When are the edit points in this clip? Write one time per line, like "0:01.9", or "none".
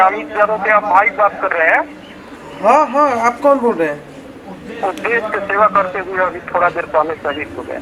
none